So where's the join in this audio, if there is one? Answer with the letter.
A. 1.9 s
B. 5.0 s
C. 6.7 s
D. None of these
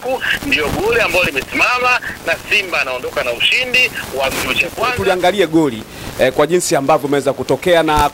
B